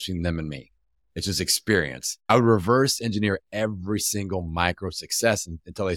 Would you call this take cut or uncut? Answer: cut